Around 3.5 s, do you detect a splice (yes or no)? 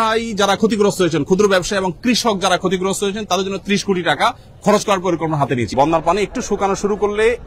no